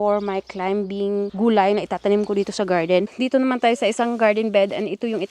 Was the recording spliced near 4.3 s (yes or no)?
no